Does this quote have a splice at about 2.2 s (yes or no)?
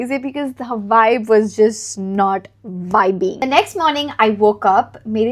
no